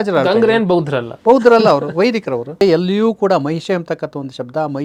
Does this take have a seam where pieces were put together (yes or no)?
yes